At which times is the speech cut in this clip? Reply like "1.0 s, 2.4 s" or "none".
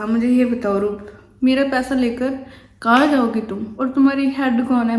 3.6 s